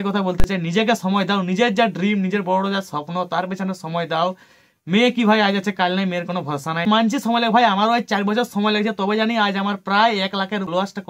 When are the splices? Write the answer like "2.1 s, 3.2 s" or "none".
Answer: none